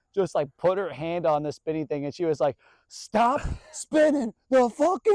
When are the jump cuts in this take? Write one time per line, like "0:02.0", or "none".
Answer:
none